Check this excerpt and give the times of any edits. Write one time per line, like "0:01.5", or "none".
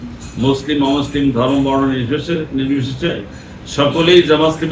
none